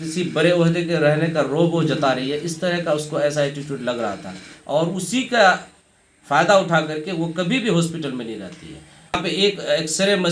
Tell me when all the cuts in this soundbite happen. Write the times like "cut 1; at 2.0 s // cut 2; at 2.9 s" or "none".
cut 1; at 9.2 s